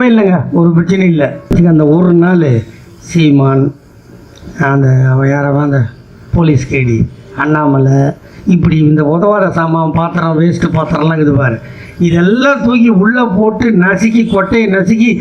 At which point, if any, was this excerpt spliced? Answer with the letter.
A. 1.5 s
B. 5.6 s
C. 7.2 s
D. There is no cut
A